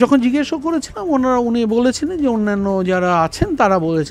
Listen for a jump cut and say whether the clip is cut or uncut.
uncut